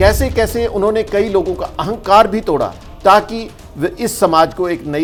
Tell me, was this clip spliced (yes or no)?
no